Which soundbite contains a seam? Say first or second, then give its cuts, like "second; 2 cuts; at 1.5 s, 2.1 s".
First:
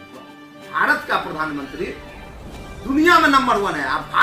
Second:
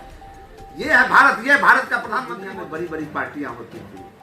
second; 1 cut; at 2.4 s